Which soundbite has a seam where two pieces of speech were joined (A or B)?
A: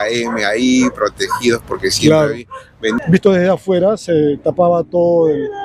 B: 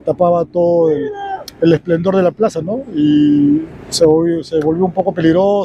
A